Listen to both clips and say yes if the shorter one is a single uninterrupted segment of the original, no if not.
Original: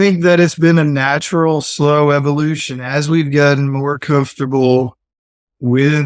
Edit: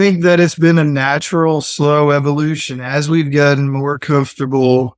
yes